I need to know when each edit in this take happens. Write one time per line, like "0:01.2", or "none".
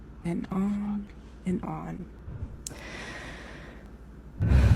0:02.0